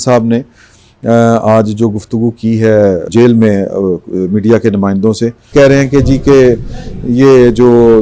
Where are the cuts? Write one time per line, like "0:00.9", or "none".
0:03.1
0:05.5